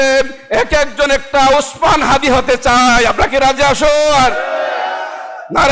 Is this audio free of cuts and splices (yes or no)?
yes